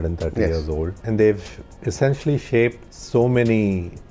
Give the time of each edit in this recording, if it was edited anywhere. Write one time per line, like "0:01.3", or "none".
0:01.0
0:02.9